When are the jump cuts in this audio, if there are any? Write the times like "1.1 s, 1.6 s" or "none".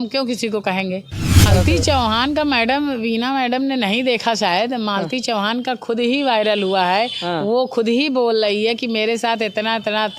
1.4 s

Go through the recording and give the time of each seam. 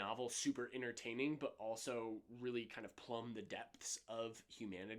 none

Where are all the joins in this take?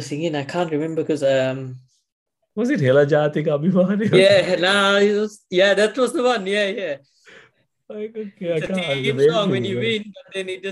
none

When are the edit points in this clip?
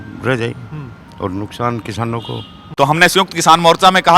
2.6 s

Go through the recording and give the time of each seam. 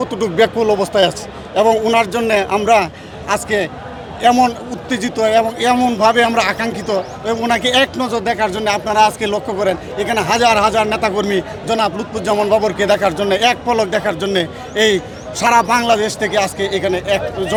none

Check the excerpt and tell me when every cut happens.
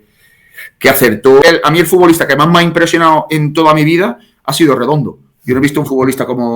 1.4 s

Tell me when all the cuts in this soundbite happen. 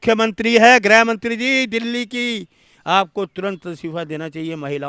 none

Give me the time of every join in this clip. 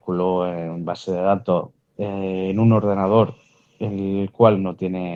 none

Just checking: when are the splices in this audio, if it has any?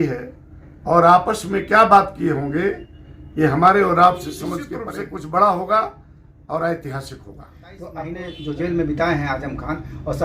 4.8 s, 8.3 s

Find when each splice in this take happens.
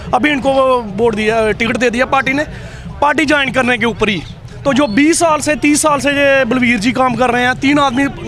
none

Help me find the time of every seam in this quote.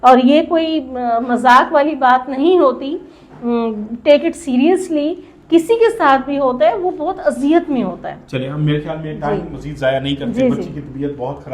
none

